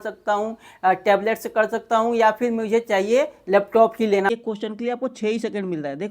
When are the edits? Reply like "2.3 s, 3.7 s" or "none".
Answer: 4.3 s